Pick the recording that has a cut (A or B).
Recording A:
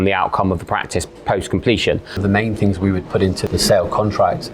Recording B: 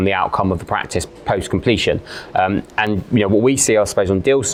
A